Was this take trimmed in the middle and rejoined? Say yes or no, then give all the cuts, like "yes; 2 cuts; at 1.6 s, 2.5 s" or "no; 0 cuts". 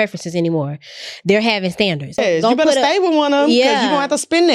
yes; 1 cut; at 2.2 s